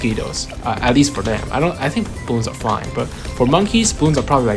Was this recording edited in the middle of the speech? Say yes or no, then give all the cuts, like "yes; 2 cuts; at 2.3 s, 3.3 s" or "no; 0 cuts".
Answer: no; 0 cuts